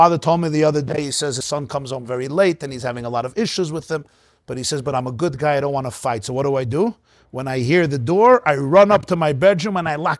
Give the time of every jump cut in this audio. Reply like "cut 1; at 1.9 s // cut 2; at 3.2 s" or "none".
cut 1; at 1.4 s

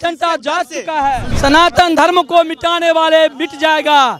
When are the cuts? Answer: cut 1; at 1.3 s

